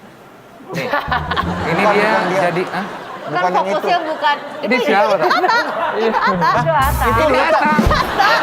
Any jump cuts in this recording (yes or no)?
no